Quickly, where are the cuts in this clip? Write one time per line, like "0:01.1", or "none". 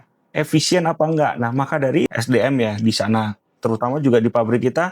0:02.1